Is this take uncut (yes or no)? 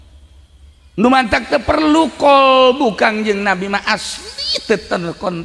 yes